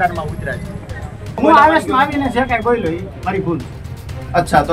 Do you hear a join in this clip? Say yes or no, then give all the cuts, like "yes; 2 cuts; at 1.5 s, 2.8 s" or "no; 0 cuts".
yes; 1 cut; at 1.4 s